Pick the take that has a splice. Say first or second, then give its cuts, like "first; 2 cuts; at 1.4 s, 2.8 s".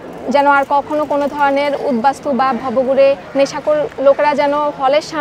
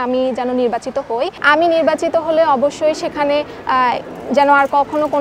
second; 1 cut; at 1.4 s